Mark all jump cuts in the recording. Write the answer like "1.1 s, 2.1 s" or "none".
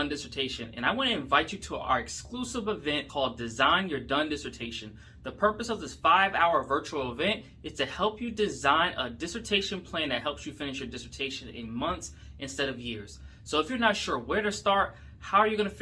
none